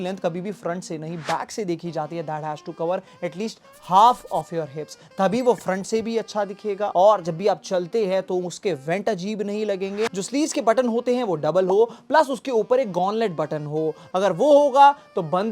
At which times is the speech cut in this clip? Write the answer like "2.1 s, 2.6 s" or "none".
10.2 s